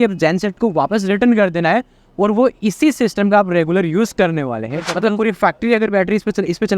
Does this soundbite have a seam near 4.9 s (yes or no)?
yes